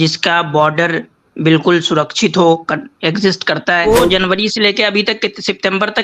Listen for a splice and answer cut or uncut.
cut